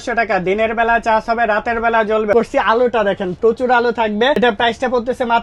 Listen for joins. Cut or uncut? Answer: cut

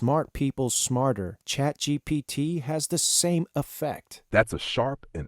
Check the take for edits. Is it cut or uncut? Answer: uncut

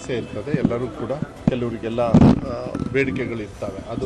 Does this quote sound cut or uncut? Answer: cut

